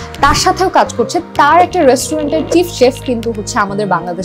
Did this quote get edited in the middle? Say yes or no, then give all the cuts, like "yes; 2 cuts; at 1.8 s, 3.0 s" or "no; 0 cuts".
no; 0 cuts